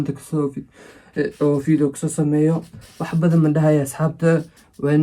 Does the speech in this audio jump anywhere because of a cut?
no; 0 cuts

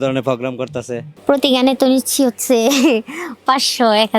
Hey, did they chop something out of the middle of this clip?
yes; 1 cut; at 1.1 s

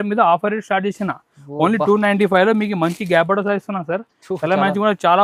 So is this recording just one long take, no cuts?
yes; 0 cuts

